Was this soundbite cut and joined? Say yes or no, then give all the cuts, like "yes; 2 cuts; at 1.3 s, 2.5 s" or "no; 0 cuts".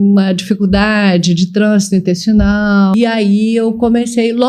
yes; 1 cut; at 2.9 s